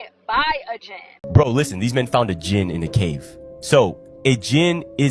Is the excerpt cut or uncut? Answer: cut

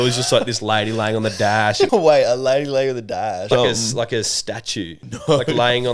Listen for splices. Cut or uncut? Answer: cut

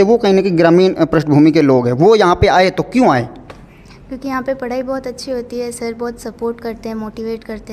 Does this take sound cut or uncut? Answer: uncut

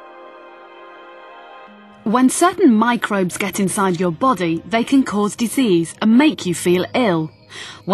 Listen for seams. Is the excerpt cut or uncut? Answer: uncut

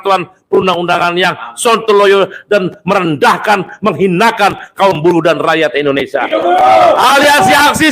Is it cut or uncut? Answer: uncut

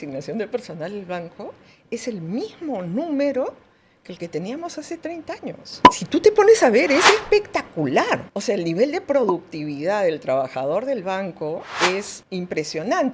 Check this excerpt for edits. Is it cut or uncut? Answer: cut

